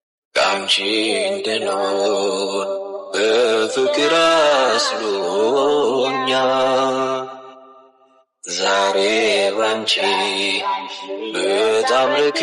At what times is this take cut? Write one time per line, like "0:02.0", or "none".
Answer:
0:07.3